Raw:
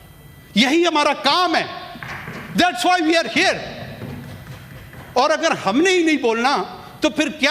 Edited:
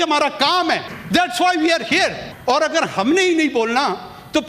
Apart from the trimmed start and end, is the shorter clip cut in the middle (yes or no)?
yes